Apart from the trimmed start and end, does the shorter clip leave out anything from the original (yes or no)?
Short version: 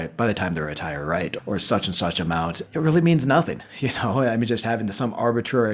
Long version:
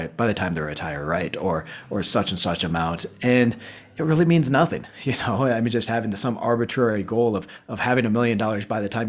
yes